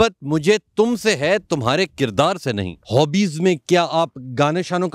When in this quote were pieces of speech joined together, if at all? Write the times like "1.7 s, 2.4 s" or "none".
2.7 s